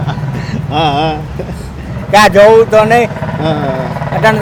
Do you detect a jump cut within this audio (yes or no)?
no